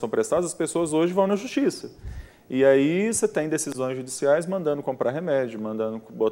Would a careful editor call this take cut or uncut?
uncut